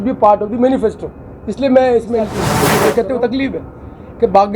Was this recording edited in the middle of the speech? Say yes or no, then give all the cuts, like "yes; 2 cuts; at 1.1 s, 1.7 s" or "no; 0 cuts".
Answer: yes; 1 cut; at 2.7 s